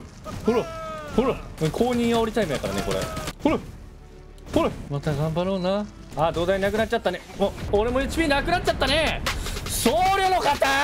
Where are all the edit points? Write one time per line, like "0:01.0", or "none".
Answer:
0:01.5
0:03.3
0:04.8
0:06.0
0:07.6